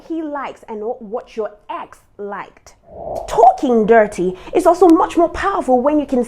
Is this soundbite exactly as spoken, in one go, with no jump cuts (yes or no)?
no